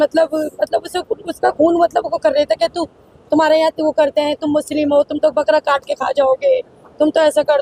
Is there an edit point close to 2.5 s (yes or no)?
no